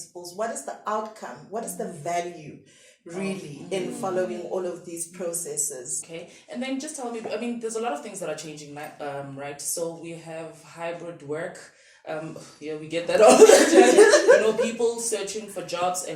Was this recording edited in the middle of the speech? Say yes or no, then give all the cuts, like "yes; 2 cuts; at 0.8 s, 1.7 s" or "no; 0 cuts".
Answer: yes; 1 cut; at 6.0 s